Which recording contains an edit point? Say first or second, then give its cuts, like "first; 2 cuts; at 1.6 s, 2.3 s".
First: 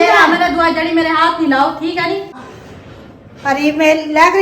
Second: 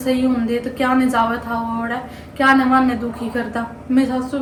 first; 1 cut; at 2.4 s